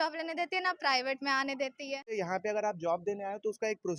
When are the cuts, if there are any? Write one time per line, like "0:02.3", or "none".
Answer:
0:02.2